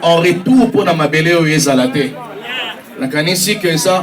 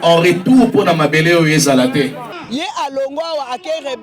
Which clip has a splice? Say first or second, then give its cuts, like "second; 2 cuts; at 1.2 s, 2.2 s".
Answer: second; 1 cut; at 2.3 s